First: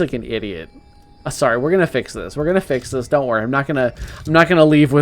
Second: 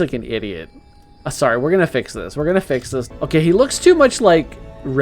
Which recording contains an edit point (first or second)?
second